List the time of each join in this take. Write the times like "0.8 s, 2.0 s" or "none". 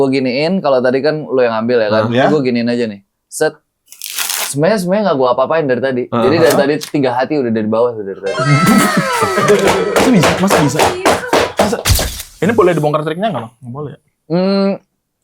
12.2 s